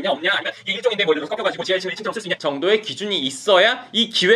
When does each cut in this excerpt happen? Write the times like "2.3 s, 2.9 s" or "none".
2.3 s